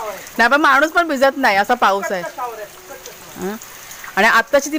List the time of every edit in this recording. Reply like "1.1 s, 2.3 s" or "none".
none